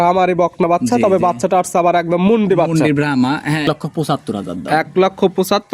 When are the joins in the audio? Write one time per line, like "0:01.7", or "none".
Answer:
0:03.6

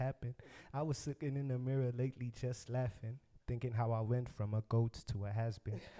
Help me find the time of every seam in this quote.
none

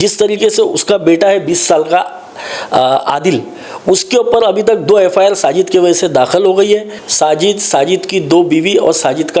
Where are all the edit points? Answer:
0:07.0

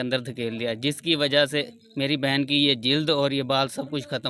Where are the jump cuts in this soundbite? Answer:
none

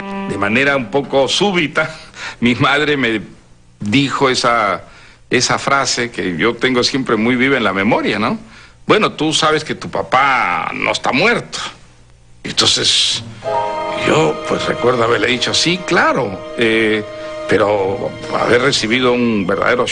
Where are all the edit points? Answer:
0:07.3

